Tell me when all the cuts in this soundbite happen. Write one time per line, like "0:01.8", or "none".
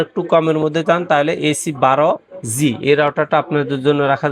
none